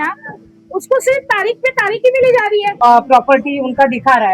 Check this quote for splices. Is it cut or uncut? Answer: cut